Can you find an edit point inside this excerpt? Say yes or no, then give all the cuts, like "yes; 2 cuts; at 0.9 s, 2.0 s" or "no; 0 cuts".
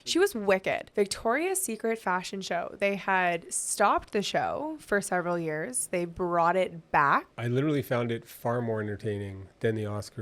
yes; 2 cuts; at 0.8 s, 7.3 s